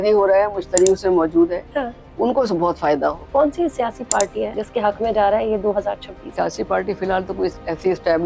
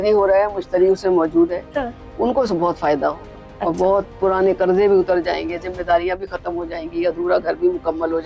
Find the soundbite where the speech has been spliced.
first; 3 cuts; at 3.2 s, 4.6 s, 6.2 s

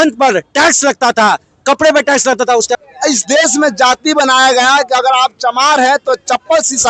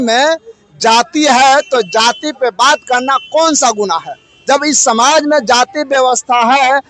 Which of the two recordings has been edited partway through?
first; 1 cut; at 2.8 s

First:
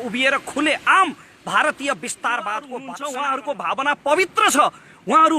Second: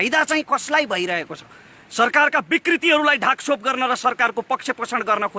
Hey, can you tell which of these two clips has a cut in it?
first; 1 cut; at 2.7 s

